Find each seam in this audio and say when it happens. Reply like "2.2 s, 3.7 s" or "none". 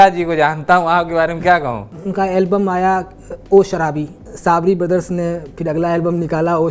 1.9 s, 4.2 s